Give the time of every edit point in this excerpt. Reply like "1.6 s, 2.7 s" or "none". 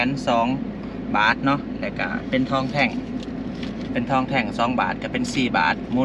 none